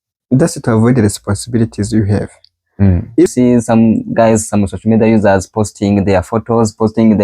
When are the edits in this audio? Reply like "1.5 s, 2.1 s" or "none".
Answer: 3.3 s